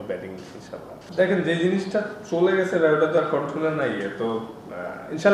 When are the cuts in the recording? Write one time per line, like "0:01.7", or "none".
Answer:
none